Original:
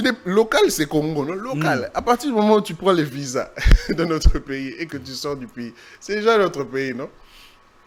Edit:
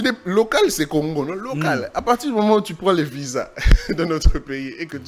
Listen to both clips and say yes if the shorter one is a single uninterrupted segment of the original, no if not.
yes